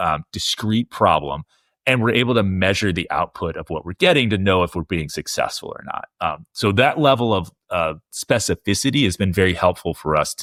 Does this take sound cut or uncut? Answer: uncut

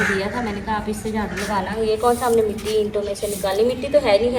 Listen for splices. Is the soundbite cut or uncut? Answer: uncut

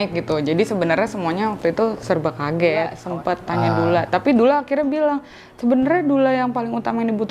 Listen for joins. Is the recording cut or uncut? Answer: cut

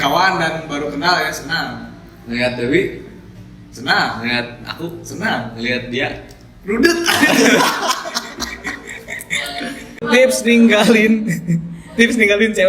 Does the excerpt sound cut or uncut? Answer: cut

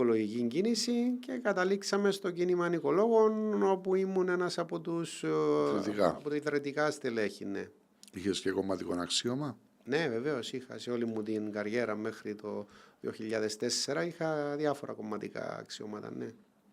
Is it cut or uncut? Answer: uncut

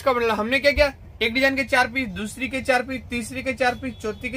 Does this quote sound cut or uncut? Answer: uncut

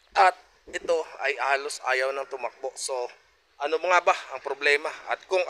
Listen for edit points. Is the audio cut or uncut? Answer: uncut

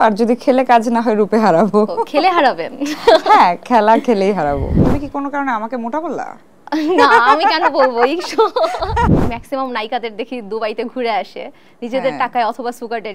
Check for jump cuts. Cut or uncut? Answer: cut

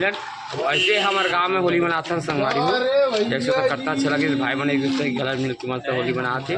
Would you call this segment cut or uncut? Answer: uncut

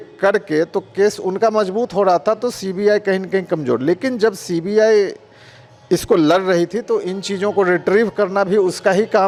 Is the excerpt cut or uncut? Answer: uncut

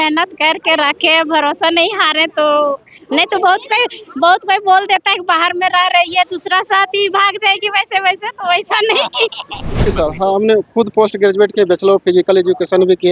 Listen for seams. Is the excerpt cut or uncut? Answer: cut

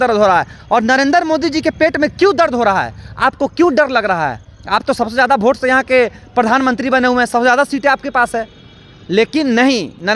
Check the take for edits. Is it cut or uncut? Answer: uncut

